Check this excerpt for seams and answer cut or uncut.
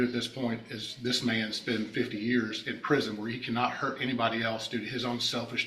uncut